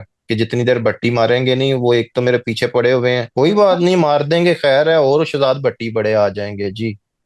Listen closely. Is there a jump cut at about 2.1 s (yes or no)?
no